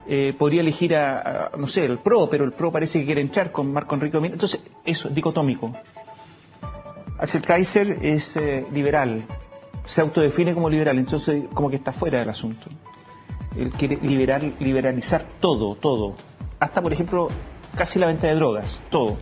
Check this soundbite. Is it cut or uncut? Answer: cut